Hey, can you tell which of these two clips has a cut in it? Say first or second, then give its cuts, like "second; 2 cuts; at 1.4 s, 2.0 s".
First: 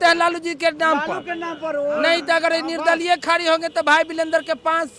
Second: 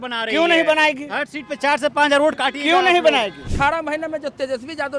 second; 1 cut; at 3.4 s